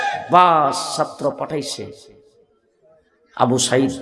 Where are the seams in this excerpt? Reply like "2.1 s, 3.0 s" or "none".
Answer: none